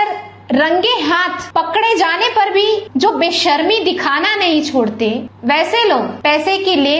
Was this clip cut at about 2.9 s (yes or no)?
yes